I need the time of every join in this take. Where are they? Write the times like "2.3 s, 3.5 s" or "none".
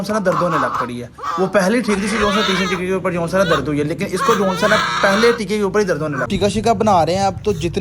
6.3 s